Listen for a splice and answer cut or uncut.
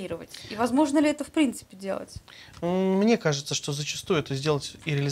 uncut